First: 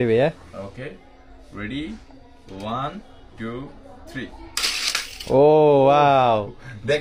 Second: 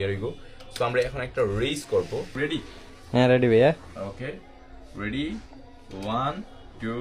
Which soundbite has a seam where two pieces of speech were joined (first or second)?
second